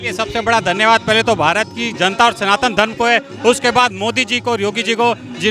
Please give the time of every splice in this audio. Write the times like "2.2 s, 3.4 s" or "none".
none